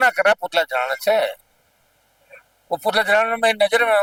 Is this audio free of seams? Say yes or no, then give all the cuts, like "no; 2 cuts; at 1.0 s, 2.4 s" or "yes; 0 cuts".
yes; 0 cuts